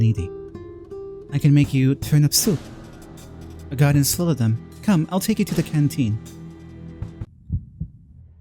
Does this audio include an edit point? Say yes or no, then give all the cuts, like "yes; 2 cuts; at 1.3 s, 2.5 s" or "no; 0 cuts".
yes; 1 cut; at 7.3 s